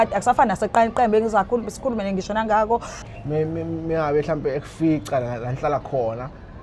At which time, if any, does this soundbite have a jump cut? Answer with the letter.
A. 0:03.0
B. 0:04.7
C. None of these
A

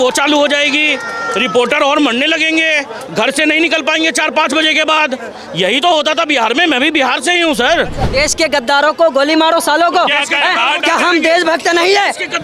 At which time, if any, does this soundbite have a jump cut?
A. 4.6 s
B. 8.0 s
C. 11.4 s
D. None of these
B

